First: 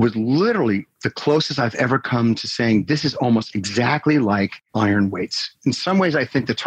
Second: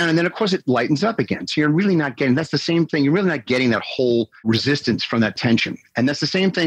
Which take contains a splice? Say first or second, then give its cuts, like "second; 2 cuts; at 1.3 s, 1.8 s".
first; 2 cuts; at 4.6 s, 5.8 s